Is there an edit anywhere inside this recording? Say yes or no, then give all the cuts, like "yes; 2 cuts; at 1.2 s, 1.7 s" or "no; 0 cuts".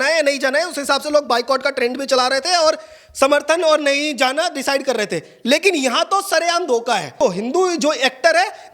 yes; 1 cut; at 7.2 s